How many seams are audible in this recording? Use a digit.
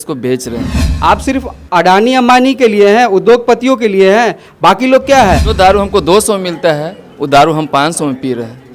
2